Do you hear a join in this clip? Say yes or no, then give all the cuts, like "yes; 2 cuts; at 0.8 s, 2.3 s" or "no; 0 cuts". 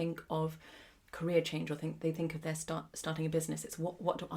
no; 0 cuts